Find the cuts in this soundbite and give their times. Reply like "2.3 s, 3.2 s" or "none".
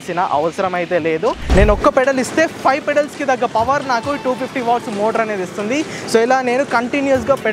1.5 s